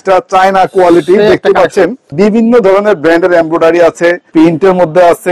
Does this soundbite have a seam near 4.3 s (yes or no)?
yes